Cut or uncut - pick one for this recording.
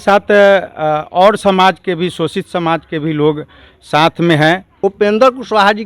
cut